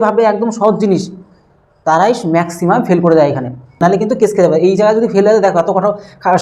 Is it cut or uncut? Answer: cut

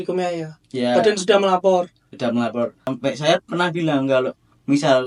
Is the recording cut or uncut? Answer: cut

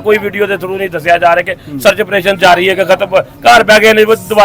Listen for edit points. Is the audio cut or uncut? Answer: uncut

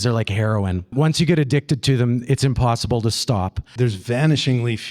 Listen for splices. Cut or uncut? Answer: cut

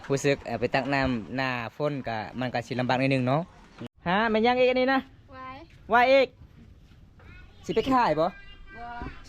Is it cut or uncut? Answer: cut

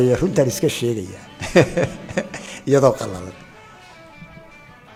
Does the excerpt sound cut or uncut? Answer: uncut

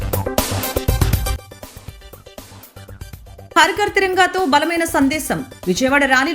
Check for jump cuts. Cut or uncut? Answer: cut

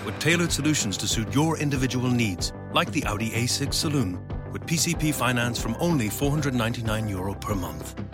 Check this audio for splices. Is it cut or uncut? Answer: uncut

